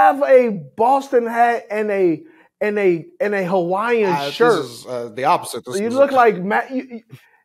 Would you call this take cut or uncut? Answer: uncut